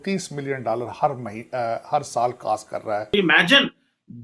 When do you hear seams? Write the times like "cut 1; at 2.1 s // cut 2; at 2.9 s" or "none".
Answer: cut 1; at 3.1 s